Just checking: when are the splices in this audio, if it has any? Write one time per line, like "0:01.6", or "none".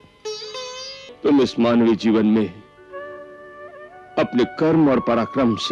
0:01.1